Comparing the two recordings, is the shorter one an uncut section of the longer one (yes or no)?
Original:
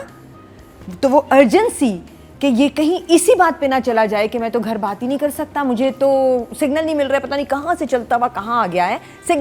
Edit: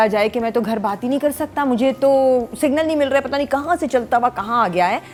yes